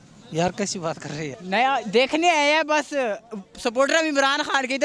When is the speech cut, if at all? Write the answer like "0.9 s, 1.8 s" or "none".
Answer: 1.3 s